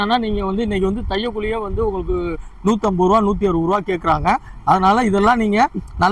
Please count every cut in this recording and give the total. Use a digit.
0